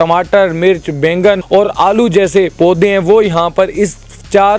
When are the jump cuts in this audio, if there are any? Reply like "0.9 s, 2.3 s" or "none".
1.4 s, 2.5 s